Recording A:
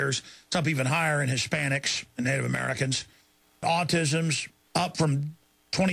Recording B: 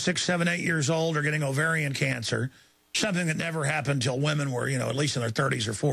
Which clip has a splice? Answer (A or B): A